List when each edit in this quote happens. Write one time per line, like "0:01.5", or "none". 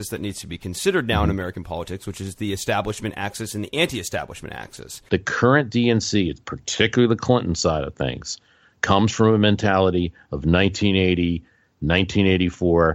0:04.9